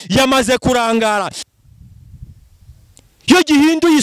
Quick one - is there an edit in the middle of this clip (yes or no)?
yes